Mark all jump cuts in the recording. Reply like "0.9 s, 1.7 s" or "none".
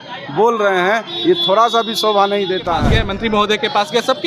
2.9 s